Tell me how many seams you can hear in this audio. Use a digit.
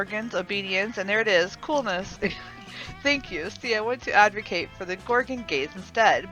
1